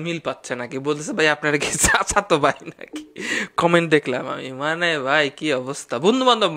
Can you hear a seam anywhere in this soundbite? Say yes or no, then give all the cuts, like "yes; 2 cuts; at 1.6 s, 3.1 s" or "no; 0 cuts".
no; 0 cuts